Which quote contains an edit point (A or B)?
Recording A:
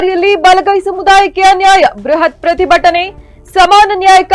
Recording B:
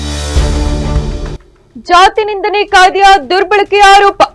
B